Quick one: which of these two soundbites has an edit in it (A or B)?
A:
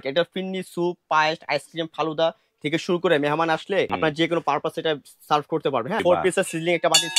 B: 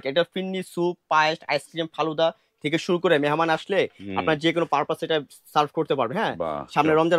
A